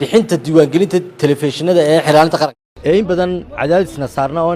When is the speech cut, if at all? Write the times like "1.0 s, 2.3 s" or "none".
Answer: 2.5 s